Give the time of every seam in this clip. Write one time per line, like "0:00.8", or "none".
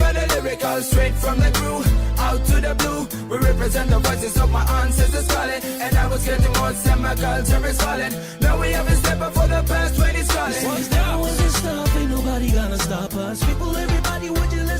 0:08.7